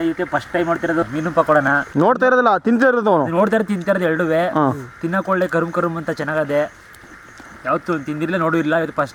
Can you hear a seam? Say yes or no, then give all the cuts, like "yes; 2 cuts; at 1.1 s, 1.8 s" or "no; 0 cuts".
no; 0 cuts